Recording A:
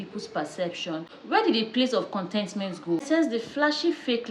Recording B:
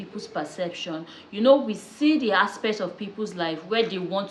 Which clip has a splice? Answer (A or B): A